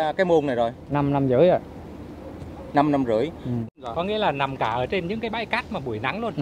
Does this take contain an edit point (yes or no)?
yes